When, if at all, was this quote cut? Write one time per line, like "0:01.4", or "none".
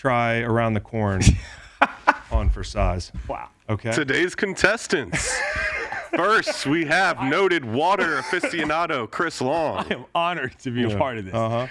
0:03.6